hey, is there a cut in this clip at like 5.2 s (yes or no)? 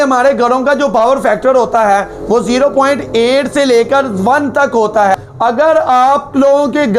yes